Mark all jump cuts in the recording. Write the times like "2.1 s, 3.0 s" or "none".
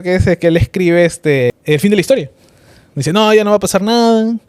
1.5 s